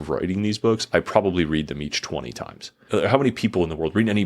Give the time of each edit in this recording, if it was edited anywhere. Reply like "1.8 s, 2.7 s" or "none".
2.8 s